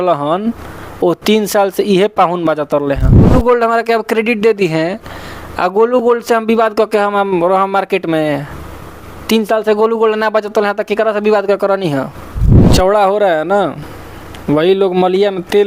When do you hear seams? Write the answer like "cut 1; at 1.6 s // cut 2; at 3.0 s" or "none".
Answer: cut 1; at 3.3 s // cut 2; at 12.7 s